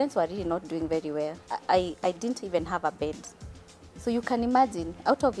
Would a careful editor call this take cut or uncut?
cut